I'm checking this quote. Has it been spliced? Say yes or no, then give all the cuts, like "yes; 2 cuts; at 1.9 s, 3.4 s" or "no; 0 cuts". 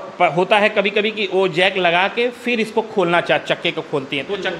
no; 0 cuts